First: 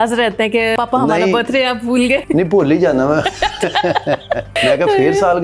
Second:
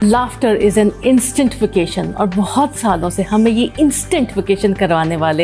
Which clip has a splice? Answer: first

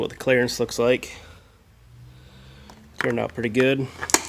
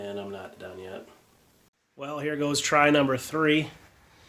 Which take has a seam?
second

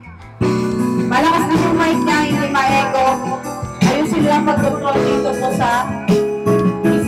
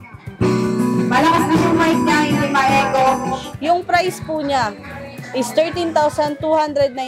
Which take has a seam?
second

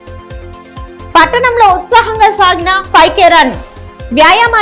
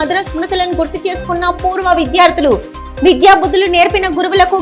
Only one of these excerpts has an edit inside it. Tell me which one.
first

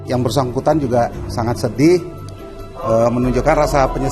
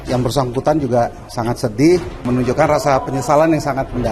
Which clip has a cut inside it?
second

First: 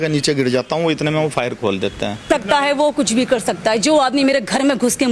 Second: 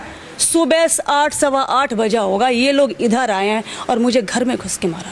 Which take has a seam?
first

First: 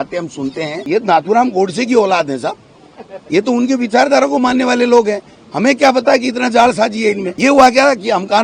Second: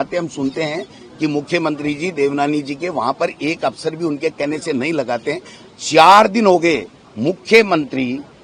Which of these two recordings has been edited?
first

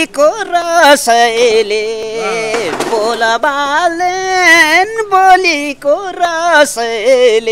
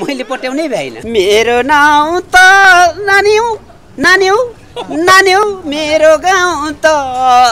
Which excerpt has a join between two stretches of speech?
second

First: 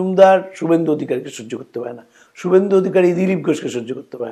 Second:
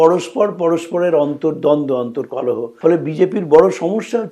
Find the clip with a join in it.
second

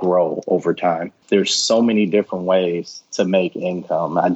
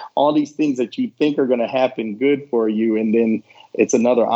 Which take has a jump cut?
first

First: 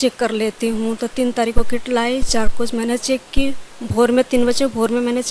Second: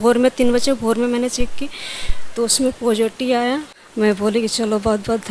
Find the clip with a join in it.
second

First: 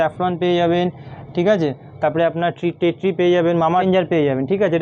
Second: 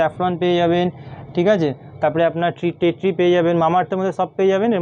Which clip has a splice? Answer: first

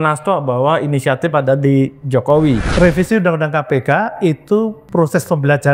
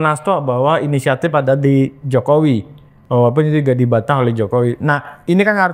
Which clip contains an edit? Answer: first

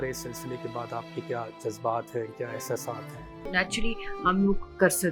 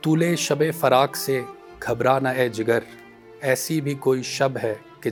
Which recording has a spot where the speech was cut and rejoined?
first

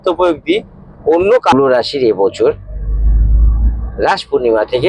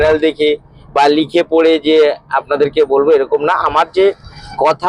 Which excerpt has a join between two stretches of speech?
first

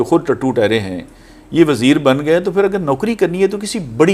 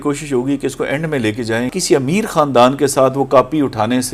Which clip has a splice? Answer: second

